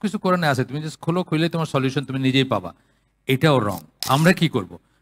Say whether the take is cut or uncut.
cut